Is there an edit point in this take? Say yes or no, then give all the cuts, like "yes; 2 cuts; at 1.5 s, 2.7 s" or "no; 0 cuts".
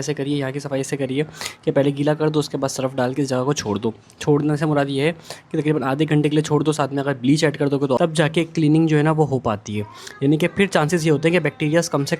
yes; 1 cut; at 8.0 s